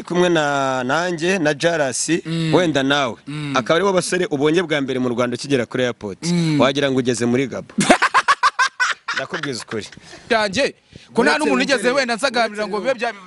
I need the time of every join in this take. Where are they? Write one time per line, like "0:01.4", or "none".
0:10.2